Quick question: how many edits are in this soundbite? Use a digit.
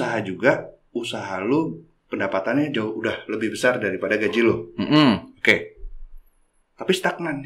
0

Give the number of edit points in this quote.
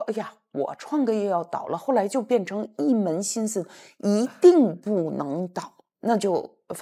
0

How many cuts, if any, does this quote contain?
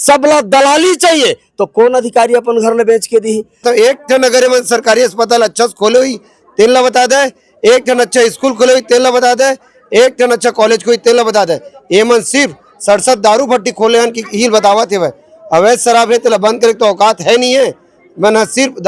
1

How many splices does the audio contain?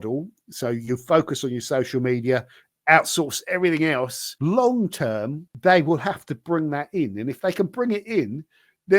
2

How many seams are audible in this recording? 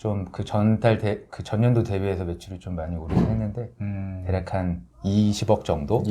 1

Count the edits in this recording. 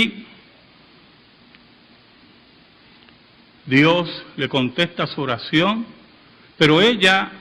1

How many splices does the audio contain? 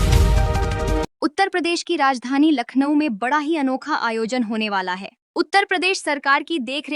1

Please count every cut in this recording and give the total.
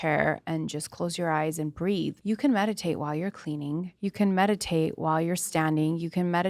2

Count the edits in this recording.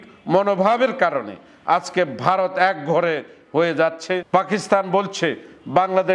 1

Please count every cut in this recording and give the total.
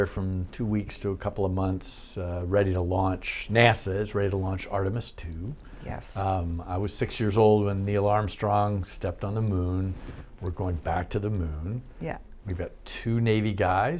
0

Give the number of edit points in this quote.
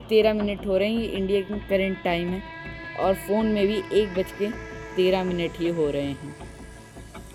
0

